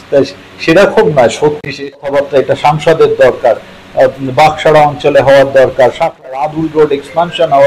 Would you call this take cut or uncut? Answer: cut